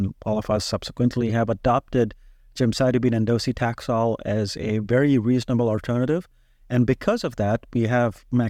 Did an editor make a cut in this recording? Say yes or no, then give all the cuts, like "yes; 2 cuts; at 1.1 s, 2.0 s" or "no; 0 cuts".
no; 0 cuts